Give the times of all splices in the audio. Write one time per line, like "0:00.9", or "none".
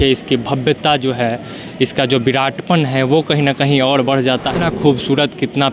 0:04.6

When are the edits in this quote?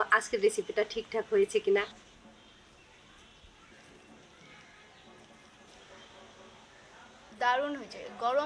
0:01.9
0:03.7
0:05.7
0:07.3

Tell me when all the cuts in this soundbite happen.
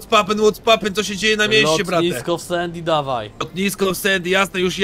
none

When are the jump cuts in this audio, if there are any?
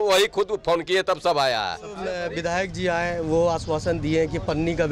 0:02.2

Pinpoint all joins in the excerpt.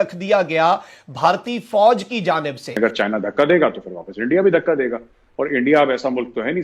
0:02.8

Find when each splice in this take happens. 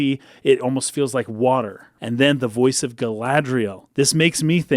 0:01.9
0:03.8

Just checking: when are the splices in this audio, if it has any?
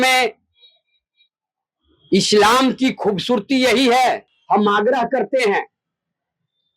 0:04.3

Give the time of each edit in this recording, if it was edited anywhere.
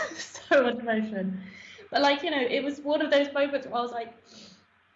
none

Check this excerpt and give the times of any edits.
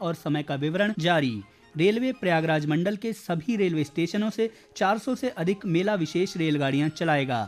0:01.0

